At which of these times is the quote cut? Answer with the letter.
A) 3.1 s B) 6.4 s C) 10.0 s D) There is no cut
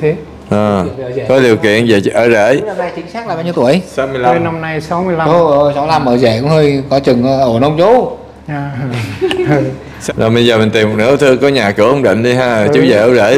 C